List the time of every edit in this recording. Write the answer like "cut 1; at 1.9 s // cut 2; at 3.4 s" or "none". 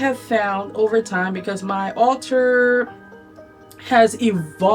none